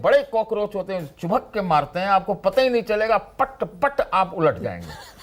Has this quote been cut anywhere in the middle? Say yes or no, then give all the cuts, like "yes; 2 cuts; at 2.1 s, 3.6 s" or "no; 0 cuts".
no; 0 cuts